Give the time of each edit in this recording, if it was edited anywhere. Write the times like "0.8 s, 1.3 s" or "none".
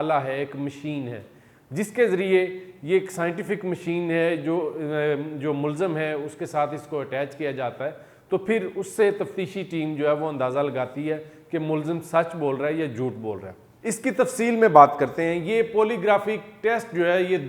none